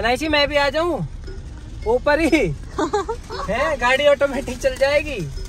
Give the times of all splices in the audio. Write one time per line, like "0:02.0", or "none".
none